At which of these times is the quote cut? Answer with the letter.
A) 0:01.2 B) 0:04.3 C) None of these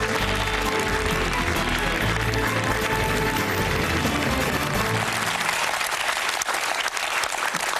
B